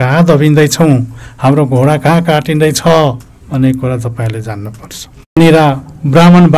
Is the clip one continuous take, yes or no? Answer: no